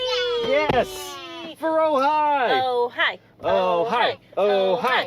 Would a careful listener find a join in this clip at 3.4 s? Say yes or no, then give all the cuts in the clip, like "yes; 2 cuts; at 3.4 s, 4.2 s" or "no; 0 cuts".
no; 0 cuts